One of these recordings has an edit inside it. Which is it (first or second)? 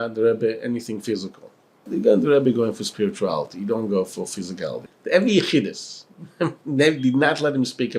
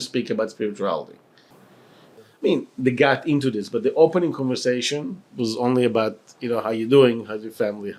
first